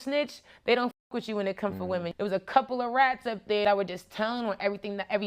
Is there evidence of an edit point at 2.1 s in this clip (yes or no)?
yes